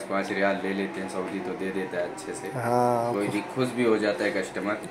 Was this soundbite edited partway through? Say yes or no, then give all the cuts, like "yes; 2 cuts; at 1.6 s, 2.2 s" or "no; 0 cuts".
no; 0 cuts